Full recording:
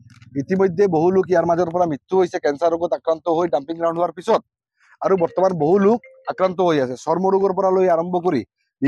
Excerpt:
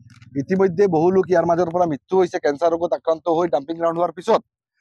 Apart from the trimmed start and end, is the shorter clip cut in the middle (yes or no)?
no